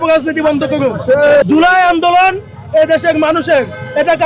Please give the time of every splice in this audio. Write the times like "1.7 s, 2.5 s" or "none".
1.4 s